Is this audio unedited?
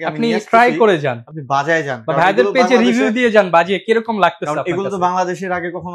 yes; 0 cuts

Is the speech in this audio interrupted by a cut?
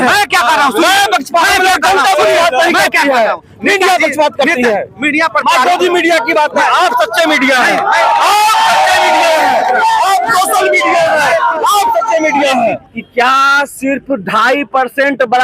yes; 1 cut; at 12.9 s

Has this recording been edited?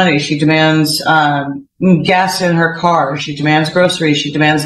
no; 0 cuts

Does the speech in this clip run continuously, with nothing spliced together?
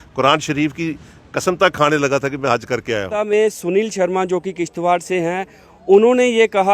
no; 1 cut; at 3.1 s

